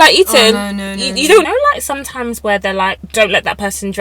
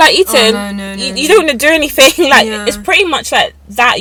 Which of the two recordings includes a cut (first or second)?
first